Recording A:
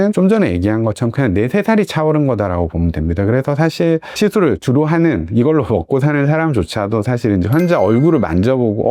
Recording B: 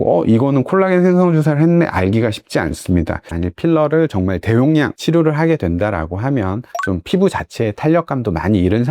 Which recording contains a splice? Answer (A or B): B